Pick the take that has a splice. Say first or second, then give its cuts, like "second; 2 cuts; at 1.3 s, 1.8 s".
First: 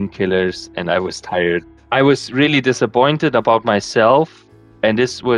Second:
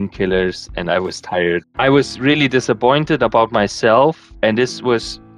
second; 2 cuts; at 1.7 s, 4.3 s